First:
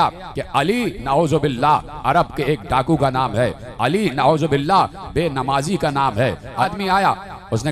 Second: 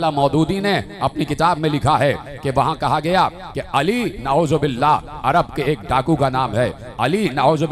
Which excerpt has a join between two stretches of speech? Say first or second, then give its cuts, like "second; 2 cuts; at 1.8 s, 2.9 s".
first; 1 cut; at 6.7 s